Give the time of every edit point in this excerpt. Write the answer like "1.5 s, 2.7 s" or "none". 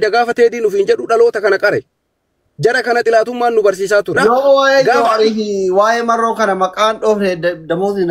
4.2 s